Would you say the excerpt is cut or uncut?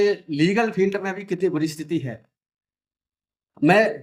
uncut